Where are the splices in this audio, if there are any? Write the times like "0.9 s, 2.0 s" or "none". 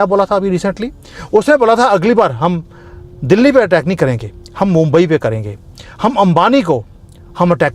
none

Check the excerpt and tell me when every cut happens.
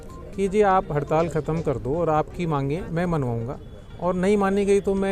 none

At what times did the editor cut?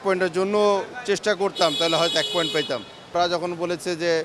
3.1 s

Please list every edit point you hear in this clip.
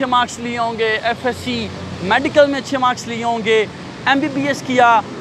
none

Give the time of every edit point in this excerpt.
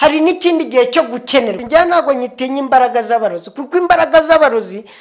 1.6 s

